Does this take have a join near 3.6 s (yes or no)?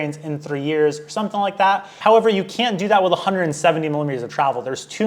no